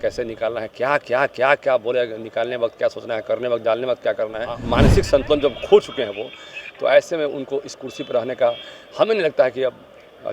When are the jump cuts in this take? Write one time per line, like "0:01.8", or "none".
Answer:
0:04.6